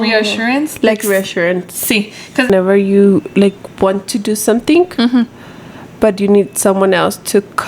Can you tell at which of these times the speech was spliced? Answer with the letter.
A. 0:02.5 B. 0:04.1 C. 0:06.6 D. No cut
A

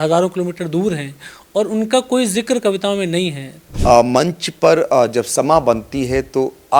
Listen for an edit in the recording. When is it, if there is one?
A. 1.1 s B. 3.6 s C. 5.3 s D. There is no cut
B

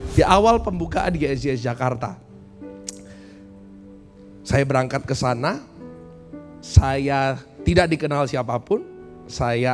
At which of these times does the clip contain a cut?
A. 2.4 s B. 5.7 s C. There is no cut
C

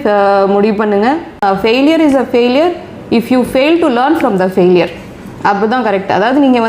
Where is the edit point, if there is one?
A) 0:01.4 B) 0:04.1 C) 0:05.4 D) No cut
A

